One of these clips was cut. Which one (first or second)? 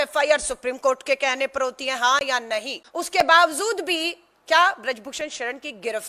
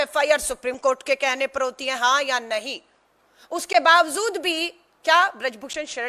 first